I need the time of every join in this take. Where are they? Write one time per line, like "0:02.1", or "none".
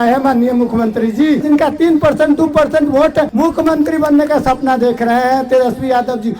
0:01.4
0:03.3